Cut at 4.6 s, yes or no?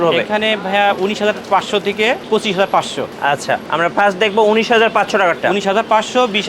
no